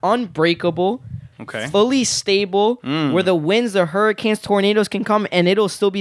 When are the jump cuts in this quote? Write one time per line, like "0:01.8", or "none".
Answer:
none

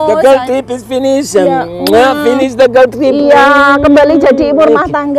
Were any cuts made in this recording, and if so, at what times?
none

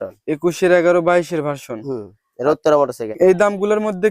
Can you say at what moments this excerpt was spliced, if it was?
0:03.1

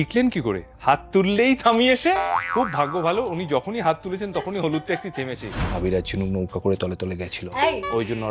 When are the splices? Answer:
0:02.2
0:05.5

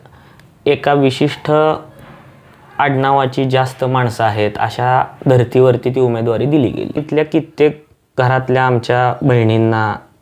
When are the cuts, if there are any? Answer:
0:07.0

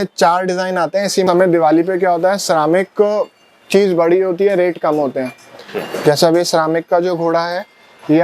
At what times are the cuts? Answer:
0:01.2

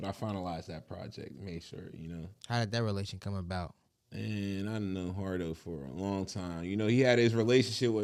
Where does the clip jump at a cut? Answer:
none

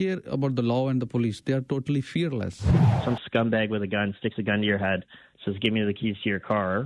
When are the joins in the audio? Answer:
0:02.9

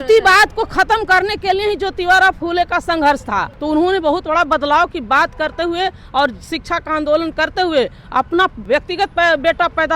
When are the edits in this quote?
0:03.5
0:08.6

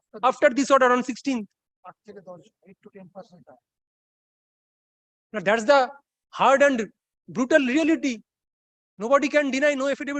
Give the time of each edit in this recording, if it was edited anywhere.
none

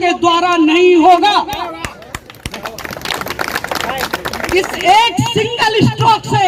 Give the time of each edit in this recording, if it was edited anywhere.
none

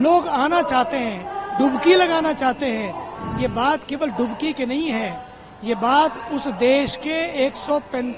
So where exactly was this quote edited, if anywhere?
0:03.0

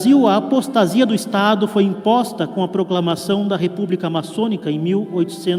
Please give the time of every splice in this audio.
none

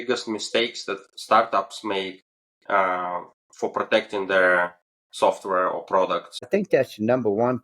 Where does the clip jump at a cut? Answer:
0:06.5

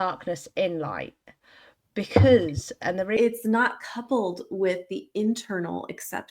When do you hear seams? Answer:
0:03.2

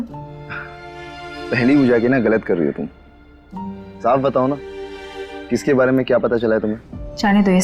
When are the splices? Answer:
none

